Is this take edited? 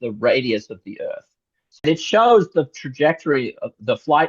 yes; 1 cut; at 1.8 s

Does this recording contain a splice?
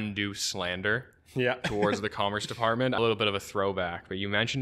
yes; 1 cut; at 3.0 s

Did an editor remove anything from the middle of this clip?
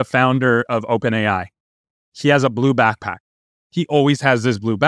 yes; 1 cut; at 3.5 s

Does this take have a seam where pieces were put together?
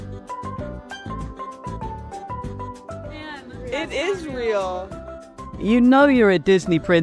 no; 0 cuts

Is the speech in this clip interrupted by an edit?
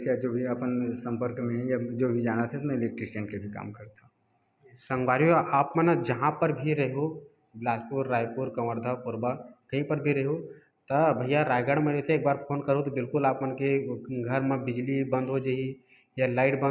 no; 0 cuts

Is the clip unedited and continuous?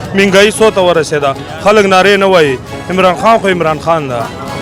yes; 0 cuts

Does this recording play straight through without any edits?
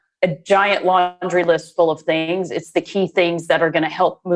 yes; 0 cuts

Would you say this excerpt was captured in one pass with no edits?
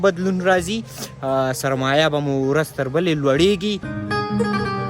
no; 1 cut; at 3.9 s

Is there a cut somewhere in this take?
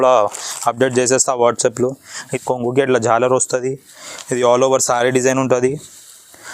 yes; 1 cut; at 2.3 s

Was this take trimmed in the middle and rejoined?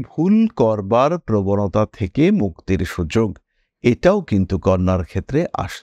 no; 0 cuts

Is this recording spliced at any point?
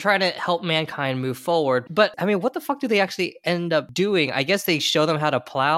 yes; 2 cuts; at 1.9 s, 3.9 s

